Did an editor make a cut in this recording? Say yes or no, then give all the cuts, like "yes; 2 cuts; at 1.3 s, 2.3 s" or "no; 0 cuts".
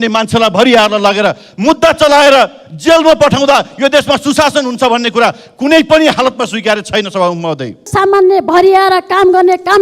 yes; 1 cut; at 7.9 s